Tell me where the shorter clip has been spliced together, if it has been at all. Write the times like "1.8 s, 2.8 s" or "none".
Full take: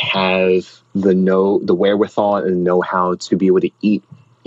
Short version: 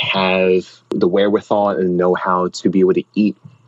0.9 s